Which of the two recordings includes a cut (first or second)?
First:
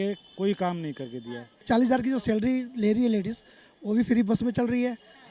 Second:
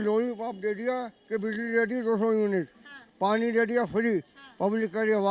first